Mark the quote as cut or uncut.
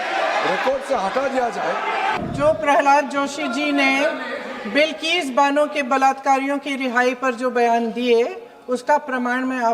cut